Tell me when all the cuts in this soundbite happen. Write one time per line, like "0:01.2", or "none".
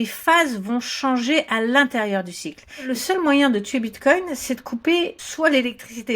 0:02.9
0:05.2